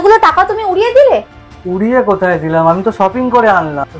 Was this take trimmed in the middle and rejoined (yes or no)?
no